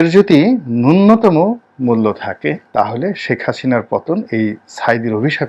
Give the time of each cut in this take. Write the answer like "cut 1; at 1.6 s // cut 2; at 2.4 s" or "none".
cut 1; at 2.6 s